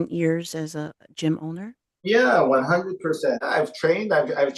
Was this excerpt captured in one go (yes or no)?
no